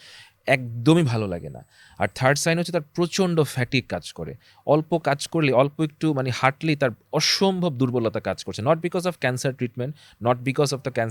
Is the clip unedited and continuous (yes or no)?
yes